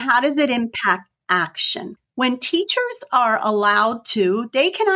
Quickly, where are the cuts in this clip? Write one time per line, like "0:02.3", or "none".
0:02.0